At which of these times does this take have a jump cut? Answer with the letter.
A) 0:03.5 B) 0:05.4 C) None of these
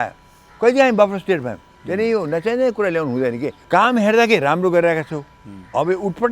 A